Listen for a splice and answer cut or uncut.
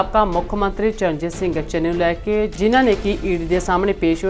cut